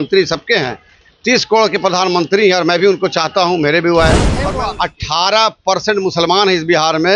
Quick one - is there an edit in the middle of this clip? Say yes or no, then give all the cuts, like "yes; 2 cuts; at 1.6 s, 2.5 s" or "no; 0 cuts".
yes; 1 cut; at 4.4 s